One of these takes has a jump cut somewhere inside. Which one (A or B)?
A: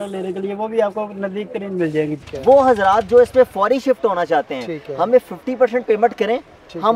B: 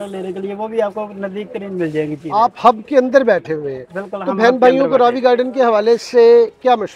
A